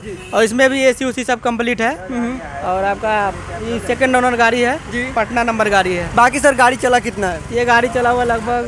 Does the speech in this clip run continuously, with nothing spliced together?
yes; 0 cuts

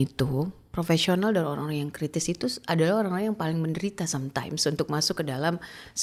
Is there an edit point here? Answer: no; 0 cuts

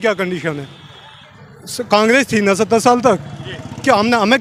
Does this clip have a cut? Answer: no; 0 cuts

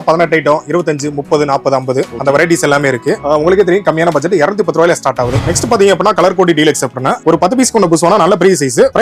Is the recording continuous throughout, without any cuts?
yes; 0 cuts

